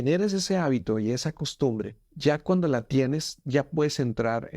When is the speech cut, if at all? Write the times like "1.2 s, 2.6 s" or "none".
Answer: 2.0 s